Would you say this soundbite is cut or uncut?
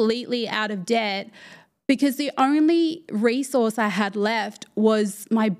uncut